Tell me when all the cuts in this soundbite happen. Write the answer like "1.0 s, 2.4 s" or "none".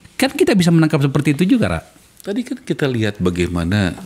none

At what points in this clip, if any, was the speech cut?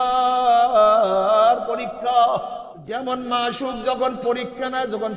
2.7 s

